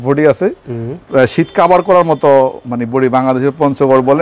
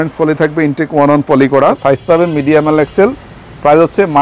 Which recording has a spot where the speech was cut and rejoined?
second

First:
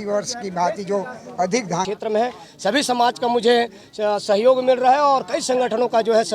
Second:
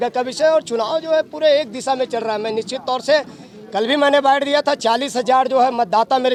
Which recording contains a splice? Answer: first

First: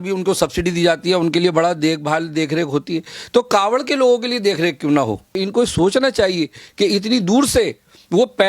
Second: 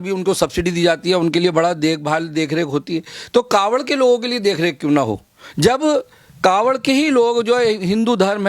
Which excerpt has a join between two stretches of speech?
first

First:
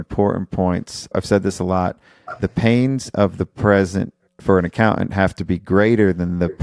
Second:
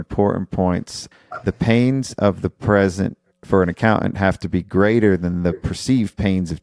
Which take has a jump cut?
second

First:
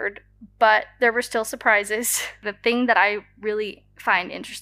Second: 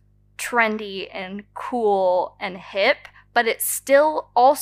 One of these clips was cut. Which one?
first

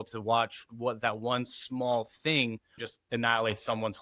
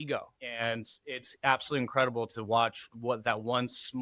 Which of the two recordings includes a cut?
first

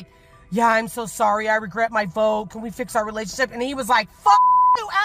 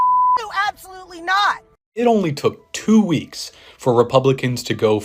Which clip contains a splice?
second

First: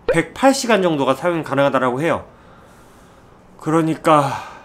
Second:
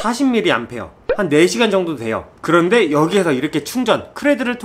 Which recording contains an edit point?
second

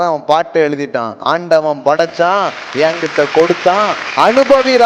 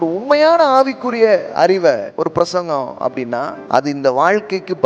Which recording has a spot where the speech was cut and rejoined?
second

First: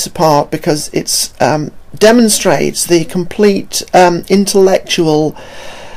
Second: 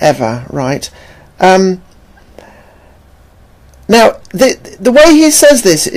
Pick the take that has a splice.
first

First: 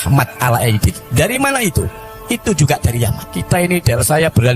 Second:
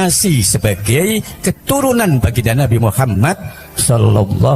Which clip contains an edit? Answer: first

